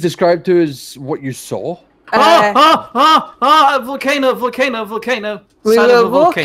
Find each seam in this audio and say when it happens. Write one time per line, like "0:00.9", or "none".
0:01.9
0:05.4